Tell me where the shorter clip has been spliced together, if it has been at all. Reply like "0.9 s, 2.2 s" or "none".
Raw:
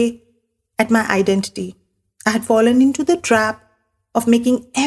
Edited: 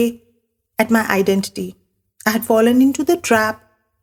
none